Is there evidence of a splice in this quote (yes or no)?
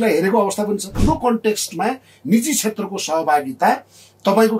yes